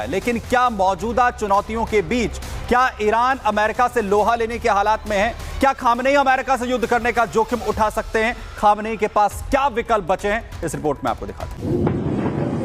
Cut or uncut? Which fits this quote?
uncut